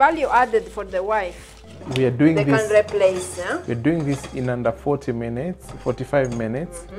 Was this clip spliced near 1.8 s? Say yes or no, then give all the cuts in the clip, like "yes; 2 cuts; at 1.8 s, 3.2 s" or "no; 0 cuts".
yes; 1 cut; at 1.8 s